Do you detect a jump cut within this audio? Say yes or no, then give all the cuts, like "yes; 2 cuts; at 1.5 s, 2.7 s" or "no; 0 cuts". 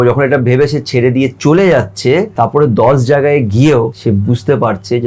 yes; 2 cuts; at 2.3 s, 4.0 s